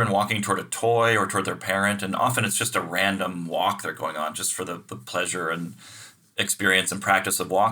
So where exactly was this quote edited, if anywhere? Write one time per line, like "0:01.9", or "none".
none